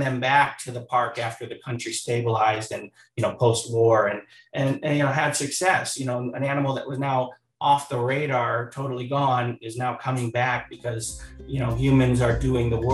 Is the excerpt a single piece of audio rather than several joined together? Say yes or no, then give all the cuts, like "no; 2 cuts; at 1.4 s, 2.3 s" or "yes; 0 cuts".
yes; 0 cuts